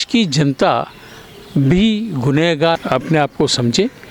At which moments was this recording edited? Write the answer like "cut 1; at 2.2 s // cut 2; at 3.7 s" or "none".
cut 1; at 2.8 s